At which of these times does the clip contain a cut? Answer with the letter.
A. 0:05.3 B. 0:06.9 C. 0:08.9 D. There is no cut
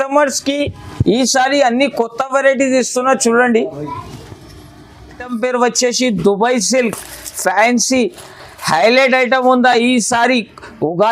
A